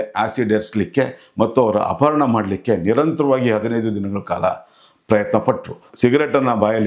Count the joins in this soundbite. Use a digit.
1